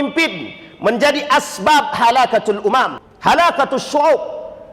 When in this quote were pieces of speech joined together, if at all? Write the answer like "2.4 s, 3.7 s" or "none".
3.0 s